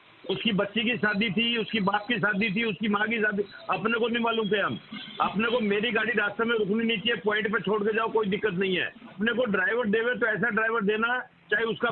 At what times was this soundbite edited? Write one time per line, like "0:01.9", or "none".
0:09.2